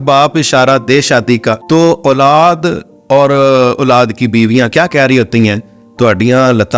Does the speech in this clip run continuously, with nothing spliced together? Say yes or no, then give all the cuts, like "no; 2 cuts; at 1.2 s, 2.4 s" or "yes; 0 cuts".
no; 1 cut; at 1.6 s